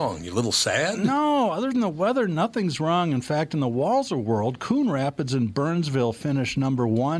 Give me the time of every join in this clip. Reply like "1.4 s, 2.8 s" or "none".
none